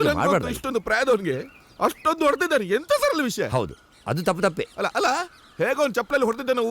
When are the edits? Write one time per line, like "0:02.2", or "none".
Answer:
0:05.4